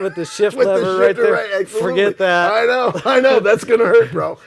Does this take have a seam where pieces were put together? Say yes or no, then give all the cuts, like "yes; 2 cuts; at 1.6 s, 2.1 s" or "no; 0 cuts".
no; 0 cuts